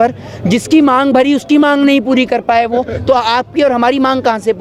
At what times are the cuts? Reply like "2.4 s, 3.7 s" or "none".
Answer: none